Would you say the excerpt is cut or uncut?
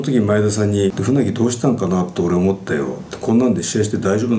cut